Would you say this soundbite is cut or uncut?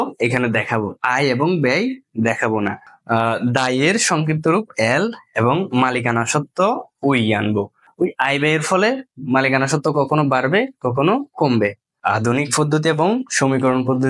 cut